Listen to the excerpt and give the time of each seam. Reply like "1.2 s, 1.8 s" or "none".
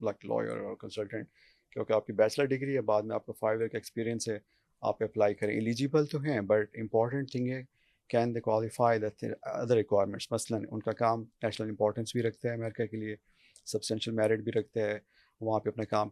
none